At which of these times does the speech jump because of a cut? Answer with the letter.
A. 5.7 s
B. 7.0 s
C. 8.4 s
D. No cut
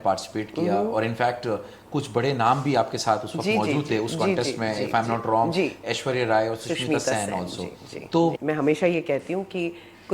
C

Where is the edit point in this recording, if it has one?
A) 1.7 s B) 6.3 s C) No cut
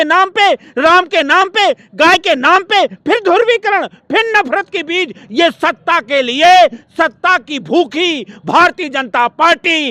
C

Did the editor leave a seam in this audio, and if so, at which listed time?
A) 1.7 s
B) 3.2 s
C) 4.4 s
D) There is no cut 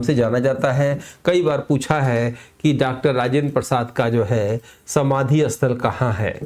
D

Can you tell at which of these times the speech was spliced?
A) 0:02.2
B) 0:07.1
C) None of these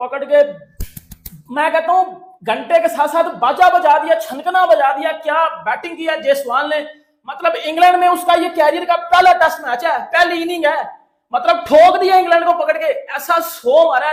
C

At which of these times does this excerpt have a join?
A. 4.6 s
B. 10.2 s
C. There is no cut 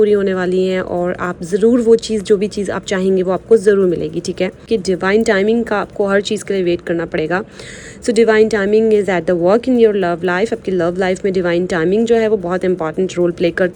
A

